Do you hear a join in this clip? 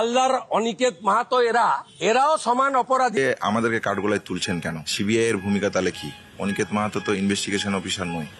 yes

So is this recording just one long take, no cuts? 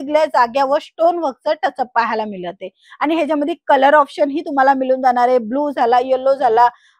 yes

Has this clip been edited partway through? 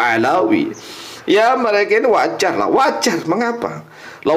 no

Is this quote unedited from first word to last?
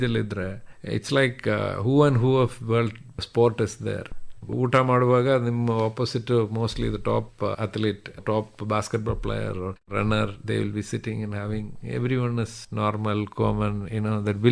no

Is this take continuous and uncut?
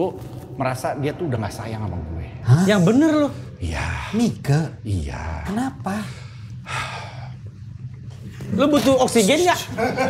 yes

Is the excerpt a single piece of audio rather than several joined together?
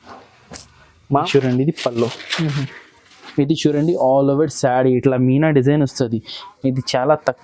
no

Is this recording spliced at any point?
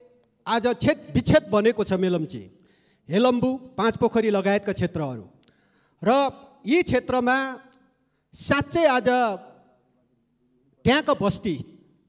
no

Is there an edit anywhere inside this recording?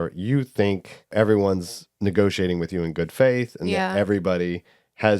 yes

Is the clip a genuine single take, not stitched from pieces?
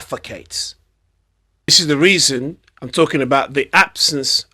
no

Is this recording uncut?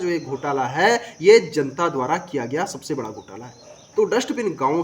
no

